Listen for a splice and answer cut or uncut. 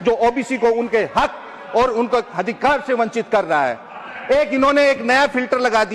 uncut